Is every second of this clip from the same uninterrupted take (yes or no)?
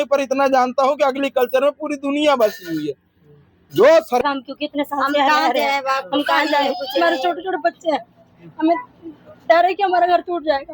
no